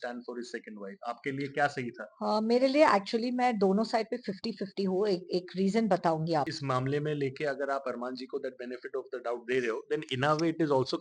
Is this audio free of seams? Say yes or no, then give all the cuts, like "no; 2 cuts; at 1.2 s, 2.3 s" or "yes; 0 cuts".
no; 1 cut; at 6.5 s